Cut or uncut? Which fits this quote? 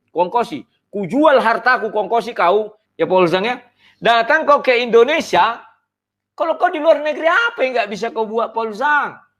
cut